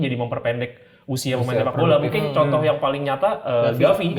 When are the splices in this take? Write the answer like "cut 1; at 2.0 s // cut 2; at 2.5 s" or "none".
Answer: none